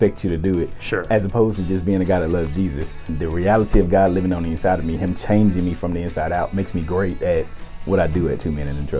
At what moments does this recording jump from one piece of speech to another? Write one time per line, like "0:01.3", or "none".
0:03.0